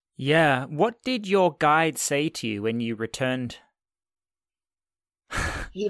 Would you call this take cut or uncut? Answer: uncut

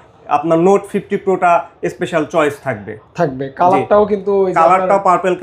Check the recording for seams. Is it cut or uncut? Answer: uncut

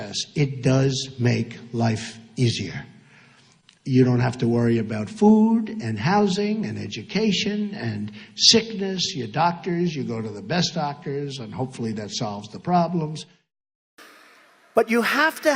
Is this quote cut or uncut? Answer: uncut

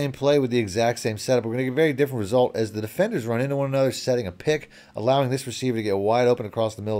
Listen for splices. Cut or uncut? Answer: uncut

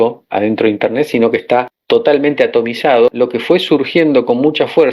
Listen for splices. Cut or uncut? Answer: cut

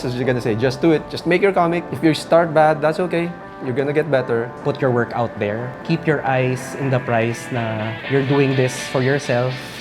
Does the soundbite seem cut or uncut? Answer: cut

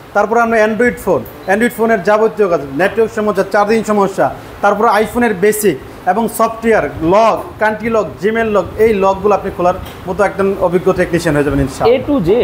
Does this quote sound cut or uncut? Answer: uncut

